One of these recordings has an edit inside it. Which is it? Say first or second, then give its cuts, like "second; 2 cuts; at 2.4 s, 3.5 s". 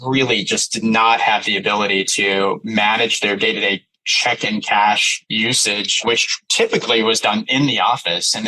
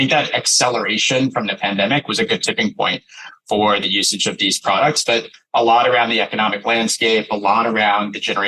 first; 1 cut; at 6.4 s